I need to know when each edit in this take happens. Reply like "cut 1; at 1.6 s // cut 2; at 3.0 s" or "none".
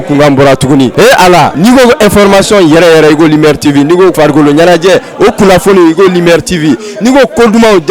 cut 1; at 1.1 s // cut 2; at 4.1 s